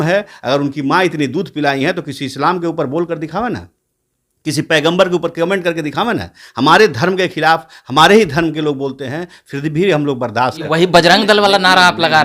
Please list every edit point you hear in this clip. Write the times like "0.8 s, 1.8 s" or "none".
10.6 s